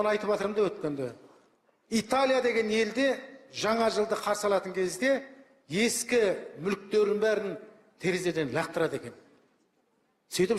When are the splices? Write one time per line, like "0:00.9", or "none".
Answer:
none